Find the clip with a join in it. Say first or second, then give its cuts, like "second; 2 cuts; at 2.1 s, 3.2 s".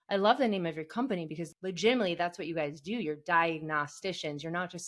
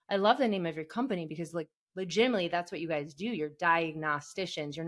first; 1 cut; at 1.5 s